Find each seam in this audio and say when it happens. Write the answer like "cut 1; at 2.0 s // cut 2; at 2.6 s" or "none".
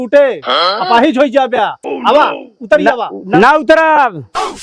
cut 1; at 3.3 s